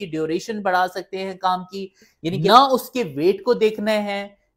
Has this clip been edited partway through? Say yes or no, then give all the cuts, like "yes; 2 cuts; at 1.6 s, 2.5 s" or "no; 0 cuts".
yes; 1 cut; at 2.5 s